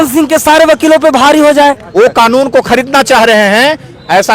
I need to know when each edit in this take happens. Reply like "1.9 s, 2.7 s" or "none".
1.8 s